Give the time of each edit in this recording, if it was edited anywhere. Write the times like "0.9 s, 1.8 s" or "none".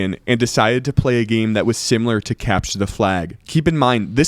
3.4 s